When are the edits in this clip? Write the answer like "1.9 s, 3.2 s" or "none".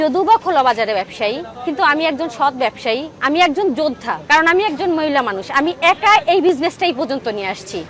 4.1 s